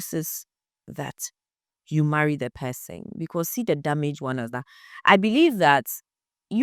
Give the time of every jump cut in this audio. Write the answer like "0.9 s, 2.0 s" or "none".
none